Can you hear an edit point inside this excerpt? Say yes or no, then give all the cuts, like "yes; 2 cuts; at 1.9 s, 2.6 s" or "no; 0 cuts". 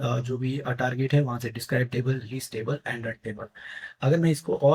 no; 0 cuts